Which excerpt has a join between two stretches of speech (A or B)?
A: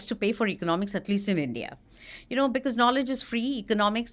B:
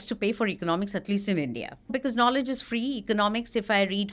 B